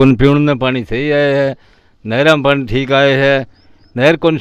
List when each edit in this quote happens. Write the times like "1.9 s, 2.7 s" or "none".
none